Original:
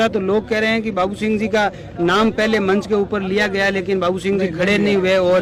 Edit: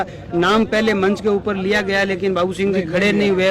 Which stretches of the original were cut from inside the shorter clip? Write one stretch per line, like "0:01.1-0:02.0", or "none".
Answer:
none

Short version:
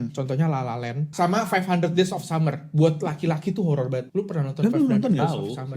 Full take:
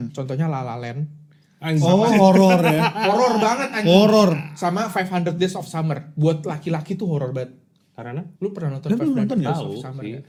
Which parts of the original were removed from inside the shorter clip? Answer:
0:01.1-0:04.5
0:07.5-0:08.3

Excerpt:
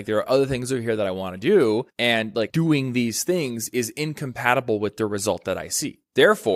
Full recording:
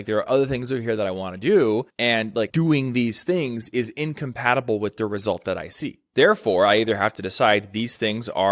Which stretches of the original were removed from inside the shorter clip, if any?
none

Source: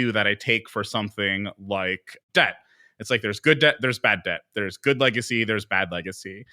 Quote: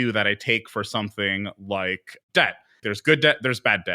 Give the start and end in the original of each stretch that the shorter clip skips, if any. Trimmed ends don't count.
0:02.8-0:03.2

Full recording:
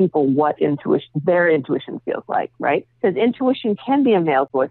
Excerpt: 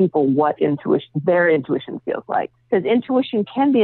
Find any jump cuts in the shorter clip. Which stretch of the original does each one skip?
0:02.6-0:02.9

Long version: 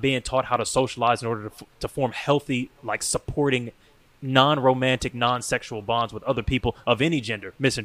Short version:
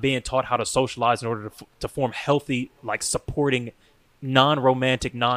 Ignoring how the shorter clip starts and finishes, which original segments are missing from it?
none

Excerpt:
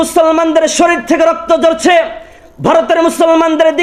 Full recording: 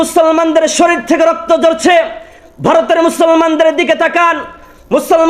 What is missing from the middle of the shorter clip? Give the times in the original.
none

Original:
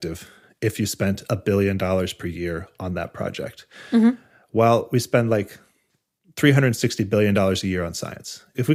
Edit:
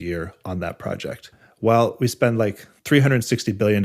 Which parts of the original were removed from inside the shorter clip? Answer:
0:03.7-0:04.3
0:05.6-0:06.2

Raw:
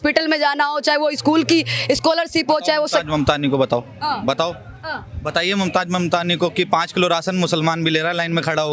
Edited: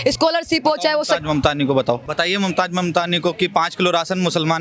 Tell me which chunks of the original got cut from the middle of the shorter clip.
0:03.9-0:05.2

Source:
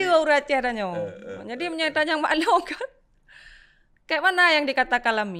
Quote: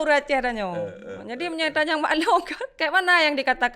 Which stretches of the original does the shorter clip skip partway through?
0:02.8-0:03.9

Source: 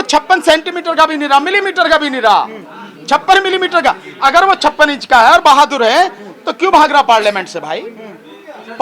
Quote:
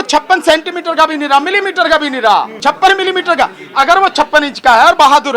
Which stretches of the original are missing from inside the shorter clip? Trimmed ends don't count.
0:02.5-0:03.0

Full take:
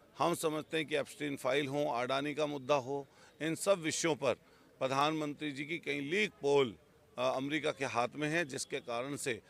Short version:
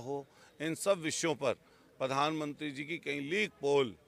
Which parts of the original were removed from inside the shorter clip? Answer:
none

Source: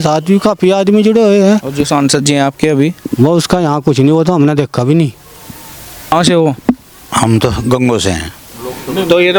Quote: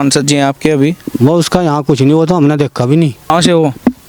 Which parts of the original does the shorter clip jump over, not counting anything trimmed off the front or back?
0:05.2-0:06.0

